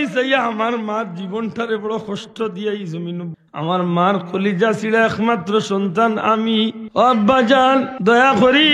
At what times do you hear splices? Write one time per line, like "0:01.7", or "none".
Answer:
0:03.3
0:06.8
0:07.9